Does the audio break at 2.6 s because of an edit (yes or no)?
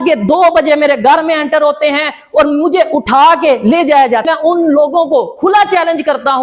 no